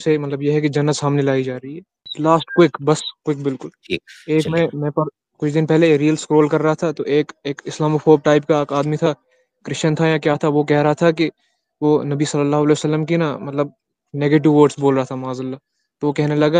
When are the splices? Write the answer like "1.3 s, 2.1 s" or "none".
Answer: 2.1 s